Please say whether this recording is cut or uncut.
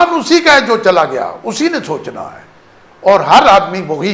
uncut